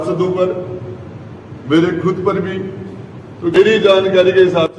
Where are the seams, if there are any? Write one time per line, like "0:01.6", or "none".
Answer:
0:03.6